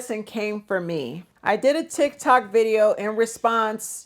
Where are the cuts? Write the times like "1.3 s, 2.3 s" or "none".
1.3 s